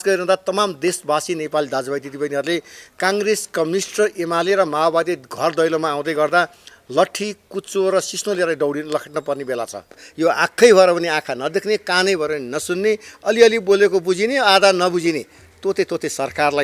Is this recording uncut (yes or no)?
no